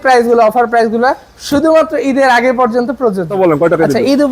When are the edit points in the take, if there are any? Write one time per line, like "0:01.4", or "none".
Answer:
0:03.3